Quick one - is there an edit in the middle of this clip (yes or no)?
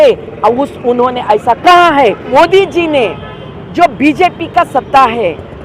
yes